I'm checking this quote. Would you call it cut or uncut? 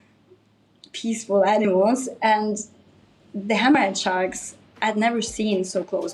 uncut